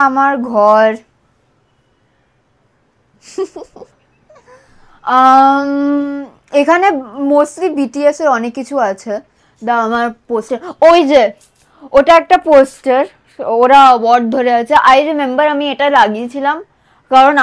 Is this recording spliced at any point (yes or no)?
no